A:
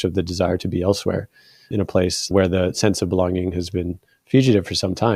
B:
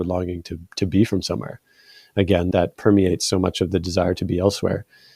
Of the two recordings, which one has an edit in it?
B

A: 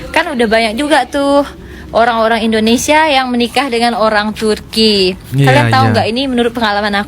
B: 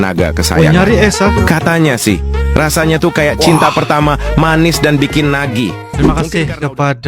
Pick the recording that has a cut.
B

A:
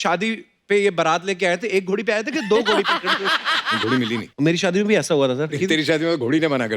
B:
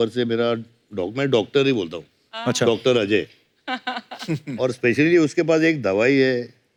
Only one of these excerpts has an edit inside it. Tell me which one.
A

